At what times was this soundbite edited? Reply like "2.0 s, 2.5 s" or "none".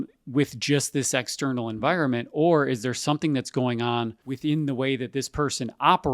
4.2 s